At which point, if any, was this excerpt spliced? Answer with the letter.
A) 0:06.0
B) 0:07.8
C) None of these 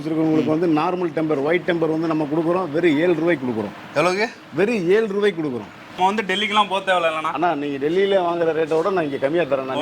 A